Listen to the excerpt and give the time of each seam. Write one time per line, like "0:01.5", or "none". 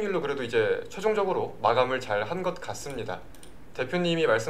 none